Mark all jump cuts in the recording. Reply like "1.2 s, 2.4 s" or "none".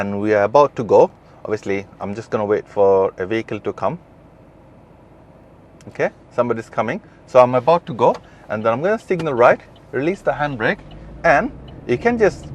5.4 s